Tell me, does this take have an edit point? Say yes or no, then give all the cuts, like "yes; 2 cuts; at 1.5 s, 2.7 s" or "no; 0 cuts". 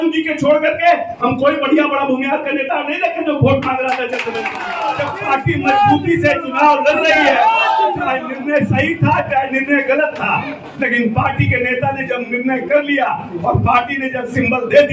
yes; 1 cut; at 4.7 s